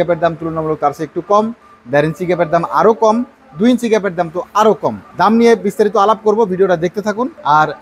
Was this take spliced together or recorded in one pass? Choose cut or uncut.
uncut